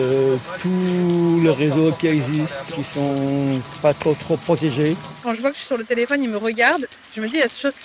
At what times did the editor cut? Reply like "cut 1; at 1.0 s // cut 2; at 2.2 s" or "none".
cut 1; at 2.7 s // cut 2; at 5.2 s